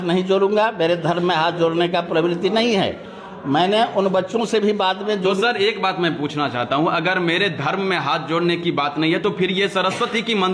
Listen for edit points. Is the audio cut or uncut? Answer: uncut